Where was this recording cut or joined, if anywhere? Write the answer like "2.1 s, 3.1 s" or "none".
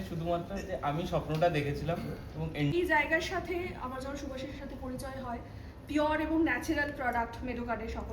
2.7 s